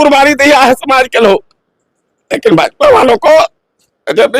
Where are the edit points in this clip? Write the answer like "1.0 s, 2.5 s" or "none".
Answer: none